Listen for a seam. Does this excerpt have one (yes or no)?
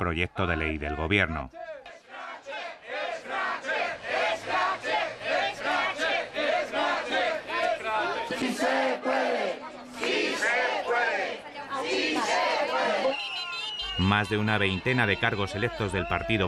no